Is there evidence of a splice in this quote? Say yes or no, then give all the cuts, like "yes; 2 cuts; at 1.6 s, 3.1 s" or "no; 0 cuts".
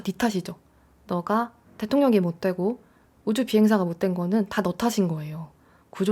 no; 0 cuts